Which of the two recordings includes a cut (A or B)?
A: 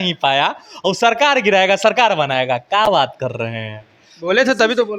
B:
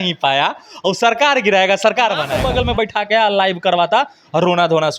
B